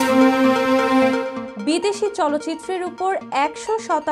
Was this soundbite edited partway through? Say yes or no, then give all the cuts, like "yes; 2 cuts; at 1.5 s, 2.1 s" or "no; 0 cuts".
no; 0 cuts